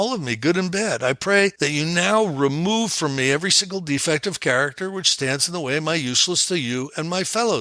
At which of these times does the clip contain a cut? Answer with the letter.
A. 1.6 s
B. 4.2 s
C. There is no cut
A